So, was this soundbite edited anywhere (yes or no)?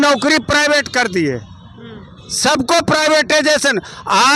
no